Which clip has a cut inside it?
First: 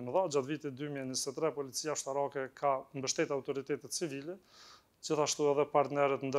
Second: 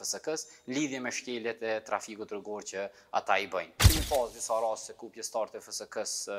second; 1 cut; at 3.8 s

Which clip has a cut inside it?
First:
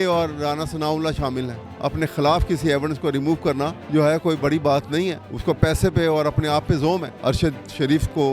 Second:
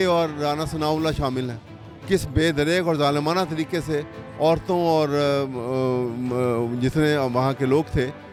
first; 4 cuts; at 1.6 s, 3.8 s, 5.3 s, 7.1 s

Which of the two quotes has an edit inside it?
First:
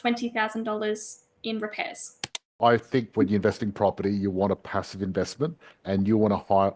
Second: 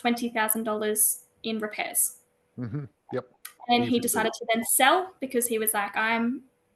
first; 1 cut; at 2.5 s

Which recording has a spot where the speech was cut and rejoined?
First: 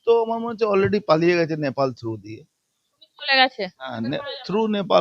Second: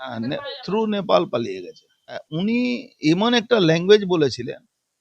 second; 1 cut; at 2.3 s

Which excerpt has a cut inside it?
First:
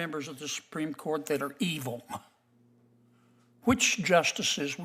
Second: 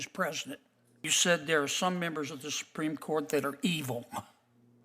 second; 1 cut; at 1.1 s

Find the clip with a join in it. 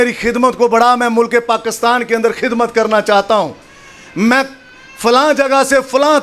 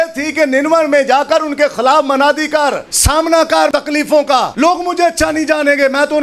second; 2 cuts; at 2.9 s, 4.1 s

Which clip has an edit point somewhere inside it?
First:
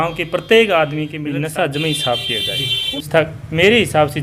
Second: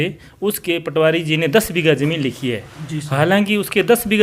first; 2 cuts; at 1.2 s, 3.0 s

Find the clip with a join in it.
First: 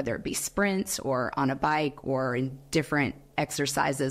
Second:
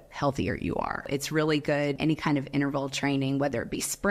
second; 2 cuts; at 1.1 s, 2.0 s

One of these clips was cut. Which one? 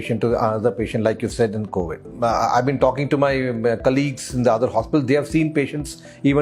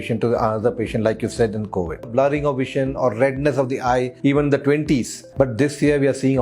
second; 3 cuts; at 2.1 s, 4.1 s, 5.2 s

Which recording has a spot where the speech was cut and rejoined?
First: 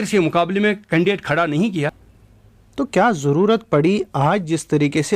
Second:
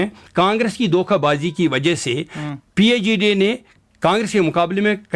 first; 1 cut; at 2.0 s

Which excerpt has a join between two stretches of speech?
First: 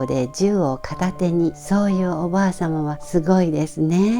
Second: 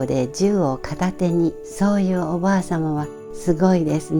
first; 2 cuts; at 1.6 s, 3.0 s

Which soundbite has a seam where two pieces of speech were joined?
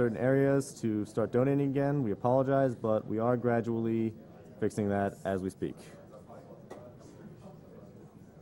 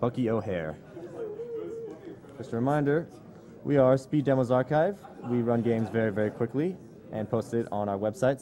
first; 1 cut; at 5.0 s

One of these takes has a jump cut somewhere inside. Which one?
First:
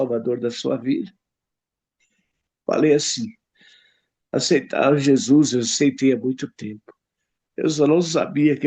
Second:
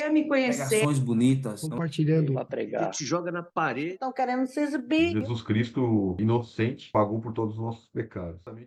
first; 1 cut; at 2.5 s

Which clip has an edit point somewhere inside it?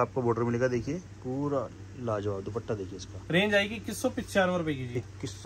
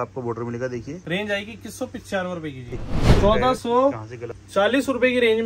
second; 2 cuts; at 1.0 s, 3.1 s

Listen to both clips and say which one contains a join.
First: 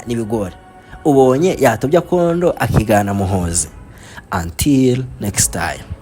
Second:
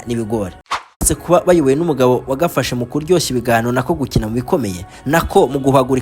second; 1 cut; at 1.0 s

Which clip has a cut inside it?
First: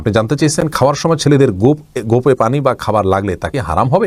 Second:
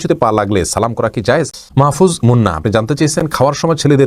second; 1 cut; at 1.5 s

